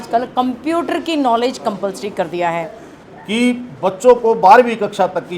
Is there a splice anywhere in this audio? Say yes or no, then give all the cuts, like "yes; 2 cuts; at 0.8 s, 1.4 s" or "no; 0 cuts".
yes; 1 cut; at 2.9 s